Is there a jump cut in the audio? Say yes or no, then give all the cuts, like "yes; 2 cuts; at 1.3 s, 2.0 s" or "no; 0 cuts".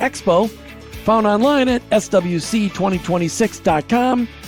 no; 0 cuts